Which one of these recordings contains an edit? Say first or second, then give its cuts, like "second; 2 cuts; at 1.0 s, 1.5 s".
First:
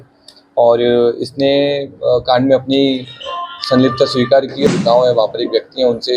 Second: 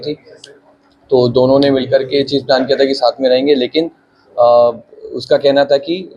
first; 1 cut; at 4.7 s